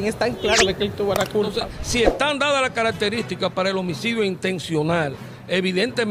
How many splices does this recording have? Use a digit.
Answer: 1